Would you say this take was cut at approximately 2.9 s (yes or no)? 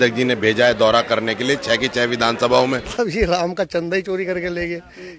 yes